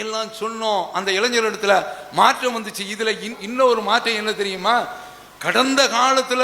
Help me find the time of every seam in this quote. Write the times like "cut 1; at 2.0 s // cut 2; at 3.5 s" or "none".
cut 1; at 3.4 s